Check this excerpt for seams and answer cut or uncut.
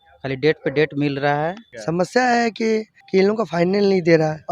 cut